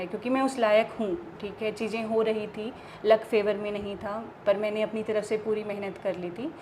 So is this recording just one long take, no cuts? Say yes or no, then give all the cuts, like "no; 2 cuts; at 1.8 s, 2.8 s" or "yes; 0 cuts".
yes; 0 cuts